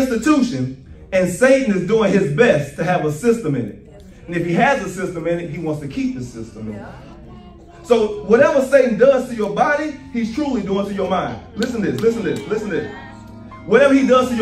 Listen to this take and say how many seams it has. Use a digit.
0